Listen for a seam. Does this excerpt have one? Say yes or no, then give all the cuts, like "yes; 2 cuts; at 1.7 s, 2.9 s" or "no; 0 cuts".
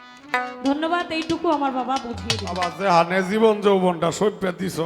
yes; 1 cut; at 2.6 s